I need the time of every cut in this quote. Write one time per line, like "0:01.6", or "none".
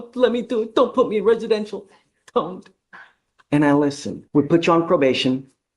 0:04.1